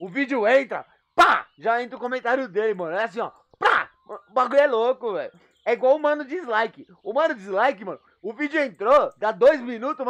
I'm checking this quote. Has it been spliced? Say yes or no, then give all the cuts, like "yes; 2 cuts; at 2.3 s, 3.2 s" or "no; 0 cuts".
no; 0 cuts